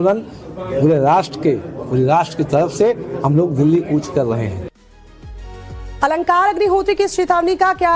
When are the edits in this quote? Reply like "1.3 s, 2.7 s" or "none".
4.3 s